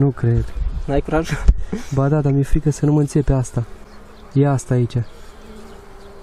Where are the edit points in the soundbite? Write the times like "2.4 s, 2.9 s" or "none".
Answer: none